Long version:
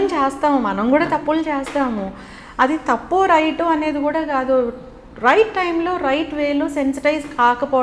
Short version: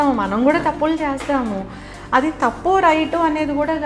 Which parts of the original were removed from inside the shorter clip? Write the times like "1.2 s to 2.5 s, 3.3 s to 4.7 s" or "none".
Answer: none